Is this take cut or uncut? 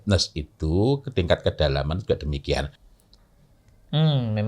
cut